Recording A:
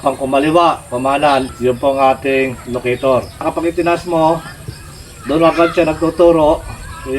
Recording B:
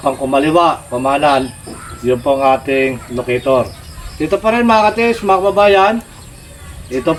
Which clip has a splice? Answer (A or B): A